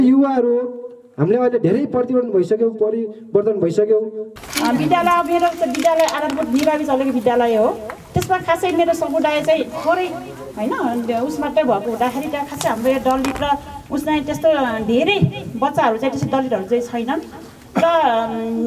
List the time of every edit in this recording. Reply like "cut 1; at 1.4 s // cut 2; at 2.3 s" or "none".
cut 1; at 4.2 s